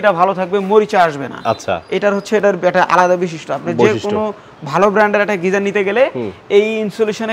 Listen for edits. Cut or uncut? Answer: uncut